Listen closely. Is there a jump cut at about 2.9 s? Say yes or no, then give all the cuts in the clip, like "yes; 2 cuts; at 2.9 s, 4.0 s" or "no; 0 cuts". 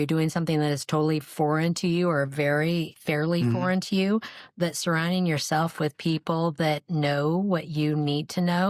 yes; 1 cut; at 2.9 s